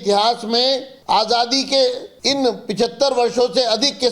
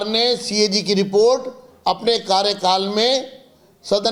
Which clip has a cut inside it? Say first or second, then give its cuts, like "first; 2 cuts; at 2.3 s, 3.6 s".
first; 2 cuts; at 0.9 s, 2.1 s